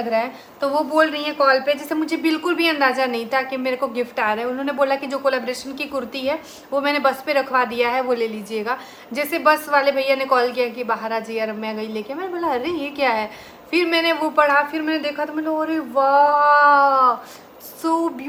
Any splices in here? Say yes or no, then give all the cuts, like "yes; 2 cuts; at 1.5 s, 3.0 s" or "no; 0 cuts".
no; 0 cuts